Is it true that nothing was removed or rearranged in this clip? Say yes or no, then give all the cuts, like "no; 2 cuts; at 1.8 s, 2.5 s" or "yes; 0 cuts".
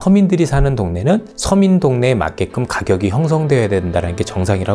yes; 0 cuts